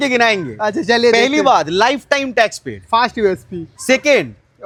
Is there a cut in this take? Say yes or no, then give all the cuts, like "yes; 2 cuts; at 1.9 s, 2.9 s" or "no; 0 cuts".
no; 0 cuts